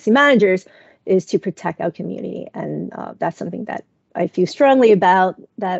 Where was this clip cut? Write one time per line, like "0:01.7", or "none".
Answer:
none